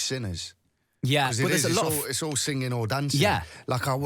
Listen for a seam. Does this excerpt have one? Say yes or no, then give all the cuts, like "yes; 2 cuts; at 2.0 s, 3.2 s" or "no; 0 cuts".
no; 0 cuts